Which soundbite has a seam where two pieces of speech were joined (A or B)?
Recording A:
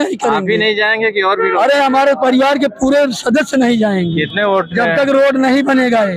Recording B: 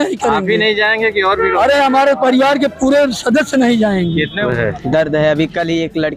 B